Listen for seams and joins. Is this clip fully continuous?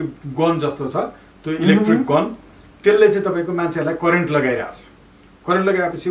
yes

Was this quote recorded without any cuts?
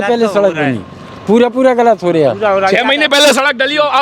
yes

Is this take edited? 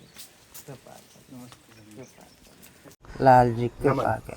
yes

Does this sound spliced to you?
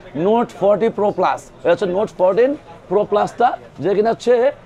no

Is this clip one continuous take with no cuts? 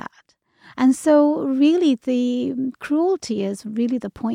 yes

